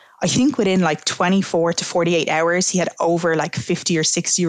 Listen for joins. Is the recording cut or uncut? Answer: uncut